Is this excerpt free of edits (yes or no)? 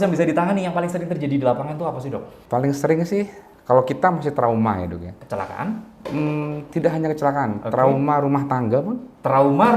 no